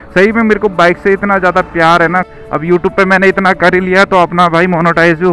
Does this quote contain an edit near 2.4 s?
yes; 1 cut; at 2.4 s

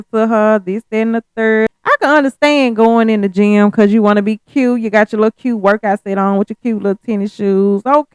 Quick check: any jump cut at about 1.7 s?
yes; 1 cut; at 1.7 s

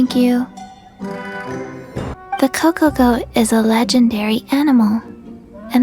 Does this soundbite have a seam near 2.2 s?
yes; 1 cut; at 2.2 s

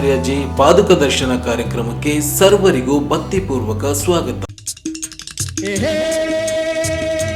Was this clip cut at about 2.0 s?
no; 1 cut; at 4.6 s

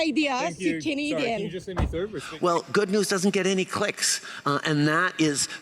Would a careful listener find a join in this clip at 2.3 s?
yes; 1 cut; at 2.3 s

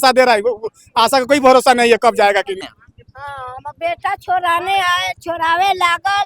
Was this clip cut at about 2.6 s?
yes; 1 cut; at 2.6 s

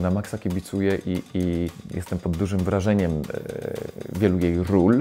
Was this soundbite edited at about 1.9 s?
yes; 1 cut; at 1.9 s

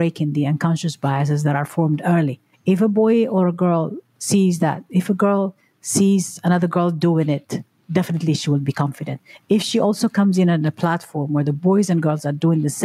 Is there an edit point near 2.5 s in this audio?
no; 0 cuts

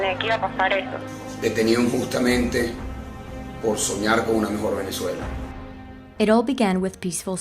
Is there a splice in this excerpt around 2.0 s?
no; 1 cut; at 3.9 s

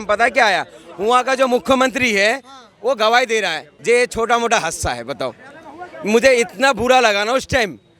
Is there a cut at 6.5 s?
no; 1 cut; at 3.6 s

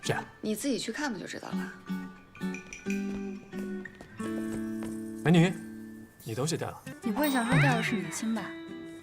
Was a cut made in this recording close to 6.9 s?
yes; 1 cut; at 6.9 s

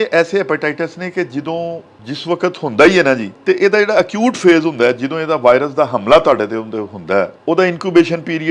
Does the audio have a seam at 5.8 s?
no; 3 cuts; at 1.9 s, 3.3 s, 7.4 s

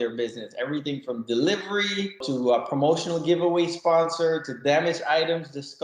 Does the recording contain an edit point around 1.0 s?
no; 1 cut; at 2.2 s

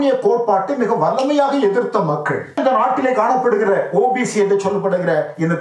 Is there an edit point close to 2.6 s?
yes; 1 cut; at 2.6 s

